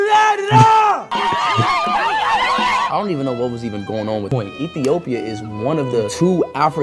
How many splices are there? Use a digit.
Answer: 2